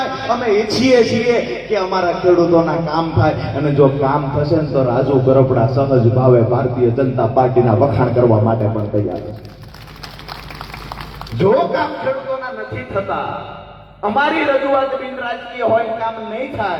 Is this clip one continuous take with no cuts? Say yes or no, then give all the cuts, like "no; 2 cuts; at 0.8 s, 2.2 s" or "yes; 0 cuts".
yes; 0 cuts